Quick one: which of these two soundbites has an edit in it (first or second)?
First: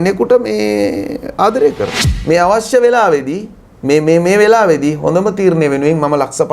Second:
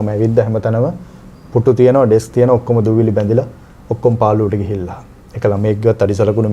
first